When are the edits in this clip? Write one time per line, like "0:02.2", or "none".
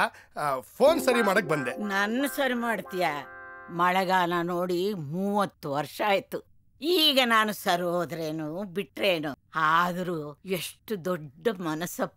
0:09.4
0:10.3